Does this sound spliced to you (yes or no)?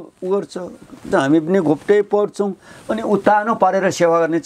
no